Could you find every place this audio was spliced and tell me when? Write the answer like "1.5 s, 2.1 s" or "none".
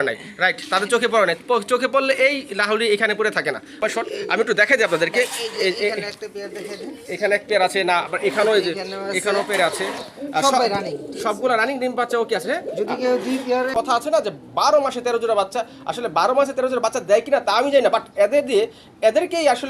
3.8 s, 13.7 s